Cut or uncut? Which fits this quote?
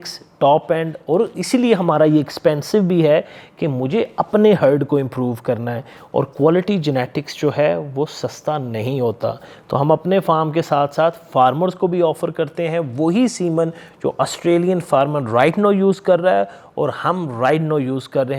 uncut